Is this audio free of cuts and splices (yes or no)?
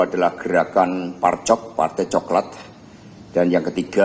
yes